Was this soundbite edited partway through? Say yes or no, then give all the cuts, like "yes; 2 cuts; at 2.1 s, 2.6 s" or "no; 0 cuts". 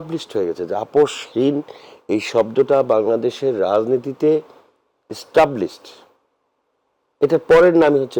no; 0 cuts